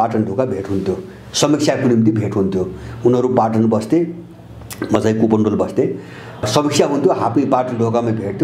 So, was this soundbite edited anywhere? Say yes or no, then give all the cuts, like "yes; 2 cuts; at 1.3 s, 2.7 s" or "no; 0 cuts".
no; 0 cuts